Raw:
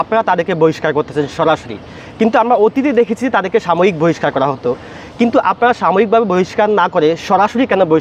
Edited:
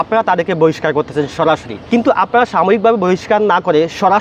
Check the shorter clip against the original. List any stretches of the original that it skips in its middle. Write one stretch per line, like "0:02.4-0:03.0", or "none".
0:01.7-0:05.0